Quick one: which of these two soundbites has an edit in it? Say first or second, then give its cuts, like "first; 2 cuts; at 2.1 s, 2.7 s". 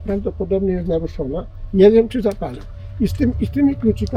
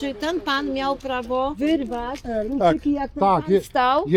second; 1 cut; at 1.6 s